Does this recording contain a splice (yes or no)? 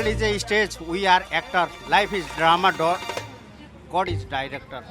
no